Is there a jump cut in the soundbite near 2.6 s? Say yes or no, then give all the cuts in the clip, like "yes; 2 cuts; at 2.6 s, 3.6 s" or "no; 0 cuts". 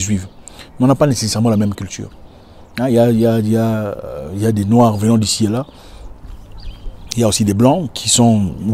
no; 0 cuts